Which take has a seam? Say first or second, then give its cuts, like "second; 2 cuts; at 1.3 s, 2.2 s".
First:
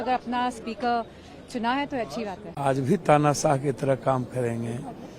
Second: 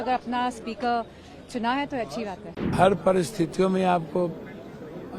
second; 1 cut; at 2.5 s